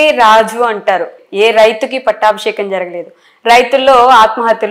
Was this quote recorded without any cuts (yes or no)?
no